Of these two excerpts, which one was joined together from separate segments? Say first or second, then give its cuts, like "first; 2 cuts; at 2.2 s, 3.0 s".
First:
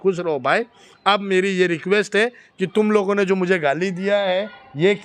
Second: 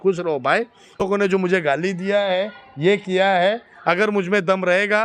second; 1 cut; at 1.0 s